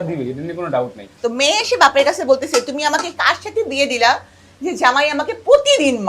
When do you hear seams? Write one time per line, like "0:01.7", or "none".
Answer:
0:01.1